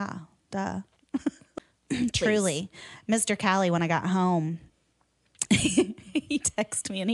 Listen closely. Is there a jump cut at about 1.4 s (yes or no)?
yes